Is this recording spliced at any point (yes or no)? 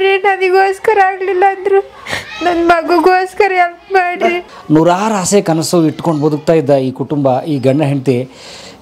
yes